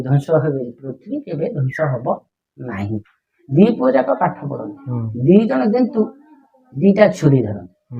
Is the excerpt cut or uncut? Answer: cut